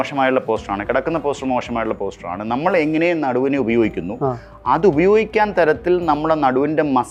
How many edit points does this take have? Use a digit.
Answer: 0